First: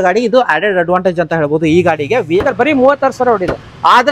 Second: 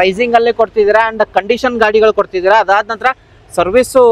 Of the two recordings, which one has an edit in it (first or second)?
first